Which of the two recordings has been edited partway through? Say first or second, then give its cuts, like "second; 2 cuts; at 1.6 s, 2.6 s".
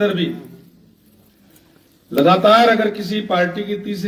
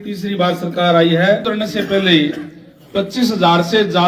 second; 1 cut; at 1.4 s